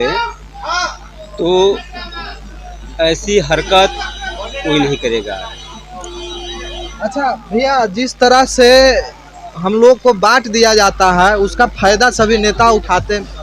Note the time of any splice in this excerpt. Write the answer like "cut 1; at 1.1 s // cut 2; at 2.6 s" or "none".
none